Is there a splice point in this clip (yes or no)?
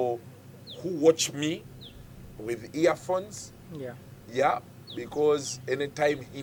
no